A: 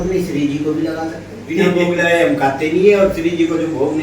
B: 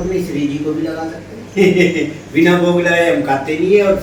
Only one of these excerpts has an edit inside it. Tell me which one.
A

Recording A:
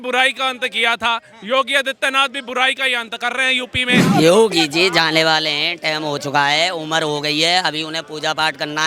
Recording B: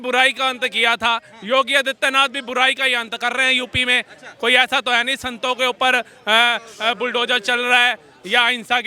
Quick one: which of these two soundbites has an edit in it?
A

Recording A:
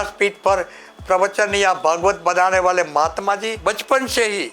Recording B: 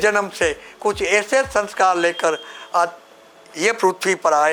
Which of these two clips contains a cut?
A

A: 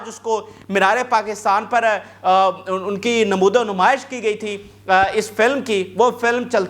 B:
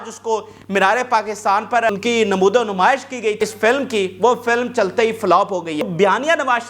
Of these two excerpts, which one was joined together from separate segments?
B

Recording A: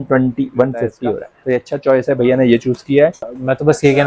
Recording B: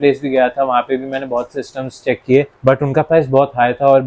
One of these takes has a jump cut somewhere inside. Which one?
A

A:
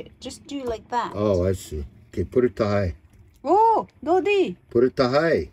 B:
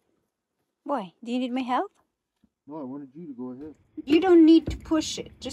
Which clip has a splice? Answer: B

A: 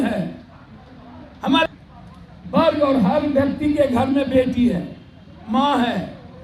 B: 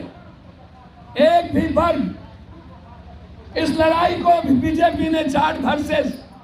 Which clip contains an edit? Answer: A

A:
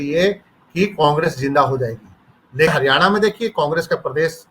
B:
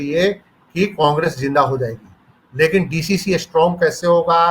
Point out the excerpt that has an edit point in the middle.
A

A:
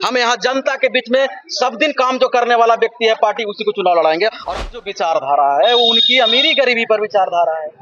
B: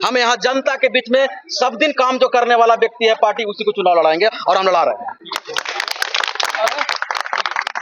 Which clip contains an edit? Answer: A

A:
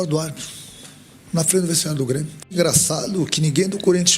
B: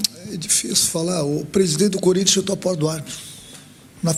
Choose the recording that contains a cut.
A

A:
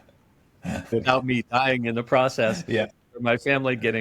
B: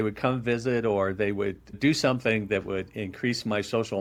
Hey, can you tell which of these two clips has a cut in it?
A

